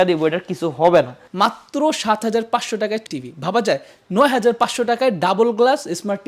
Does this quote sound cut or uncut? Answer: cut